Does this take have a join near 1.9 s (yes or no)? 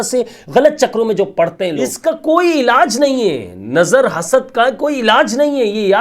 yes